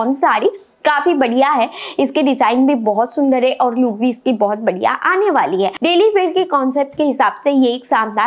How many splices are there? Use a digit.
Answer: 1